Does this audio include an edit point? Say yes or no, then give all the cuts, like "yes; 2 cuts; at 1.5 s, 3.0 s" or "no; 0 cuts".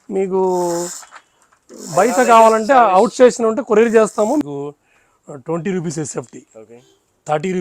yes; 1 cut; at 4.4 s